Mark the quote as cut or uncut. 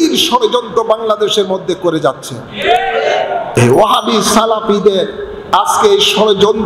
cut